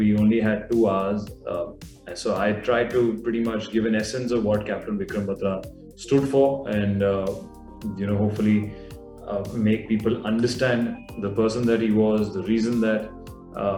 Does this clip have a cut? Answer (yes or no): no